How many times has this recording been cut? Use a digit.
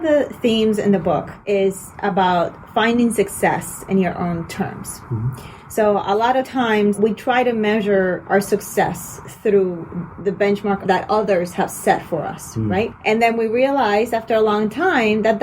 4